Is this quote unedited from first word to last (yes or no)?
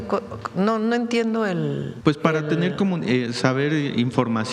no